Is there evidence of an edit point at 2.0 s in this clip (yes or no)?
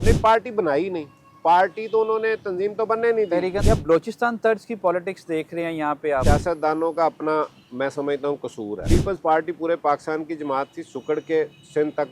no